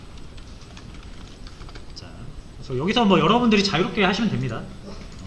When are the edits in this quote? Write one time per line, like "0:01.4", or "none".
0:02.8